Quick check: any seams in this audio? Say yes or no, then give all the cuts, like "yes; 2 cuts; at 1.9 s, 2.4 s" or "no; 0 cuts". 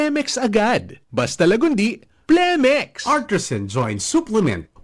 yes; 1 cut; at 3.0 s